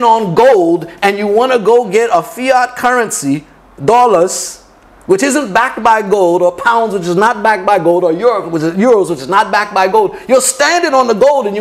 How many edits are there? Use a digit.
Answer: 0